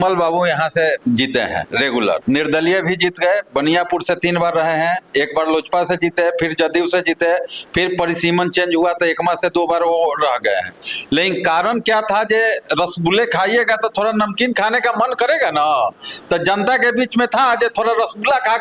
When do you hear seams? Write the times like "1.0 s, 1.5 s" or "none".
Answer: 1.2 s